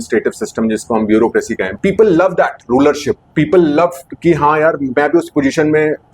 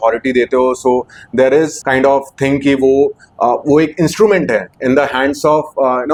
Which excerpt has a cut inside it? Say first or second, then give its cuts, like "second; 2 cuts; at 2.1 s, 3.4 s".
first; 1 cut; at 1.7 s